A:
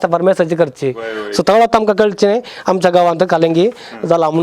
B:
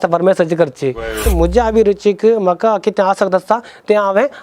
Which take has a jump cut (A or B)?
B